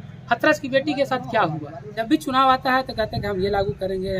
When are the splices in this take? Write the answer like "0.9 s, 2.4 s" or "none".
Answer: 1.7 s